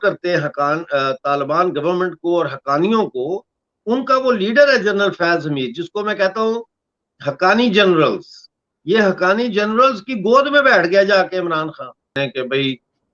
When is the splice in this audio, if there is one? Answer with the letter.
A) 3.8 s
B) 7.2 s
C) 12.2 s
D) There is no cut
C